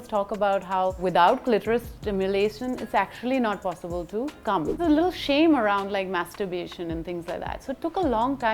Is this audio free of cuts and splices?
no; 1 cut; at 4.8 s

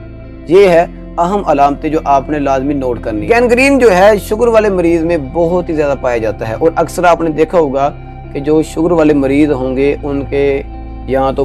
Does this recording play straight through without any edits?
no; 1 cut; at 3.2 s

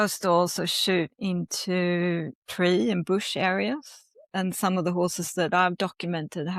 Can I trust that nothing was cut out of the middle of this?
yes; 0 cuts

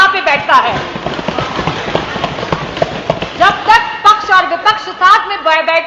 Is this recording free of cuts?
yes; 0 cuts

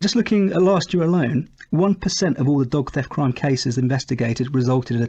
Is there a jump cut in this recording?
no; 0 cuts

